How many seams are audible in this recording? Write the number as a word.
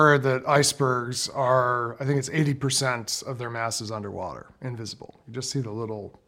zero